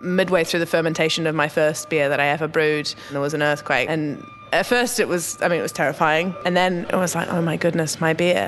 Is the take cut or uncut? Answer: cut